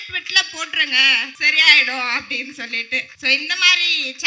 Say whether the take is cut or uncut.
cut